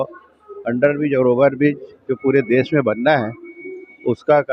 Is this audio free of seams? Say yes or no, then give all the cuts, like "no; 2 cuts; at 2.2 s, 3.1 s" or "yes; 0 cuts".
yes; 0 cuts